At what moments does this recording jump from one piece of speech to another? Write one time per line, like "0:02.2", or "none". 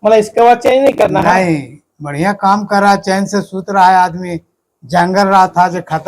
none